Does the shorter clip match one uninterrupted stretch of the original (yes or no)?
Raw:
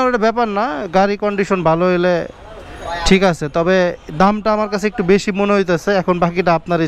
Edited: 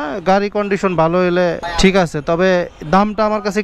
no